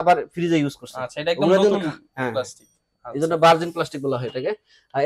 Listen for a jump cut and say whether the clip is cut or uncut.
uncut